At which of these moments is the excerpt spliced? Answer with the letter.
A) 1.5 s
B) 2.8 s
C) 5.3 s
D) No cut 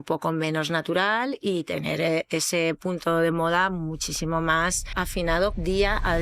C